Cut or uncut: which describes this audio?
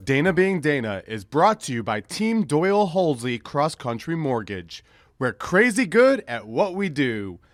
uncut